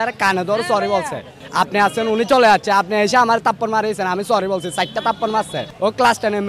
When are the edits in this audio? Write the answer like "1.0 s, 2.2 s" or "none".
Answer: 1.4 s, 5.6 s

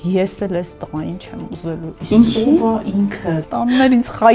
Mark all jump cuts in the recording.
3.4 s

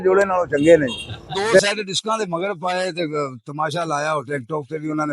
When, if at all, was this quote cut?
1.6 s

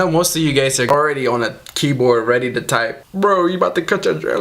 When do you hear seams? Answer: 0.9 s

